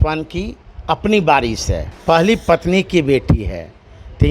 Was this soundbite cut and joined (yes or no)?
yes